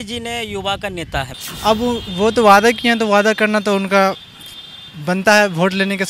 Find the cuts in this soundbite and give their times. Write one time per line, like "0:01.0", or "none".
0:01.4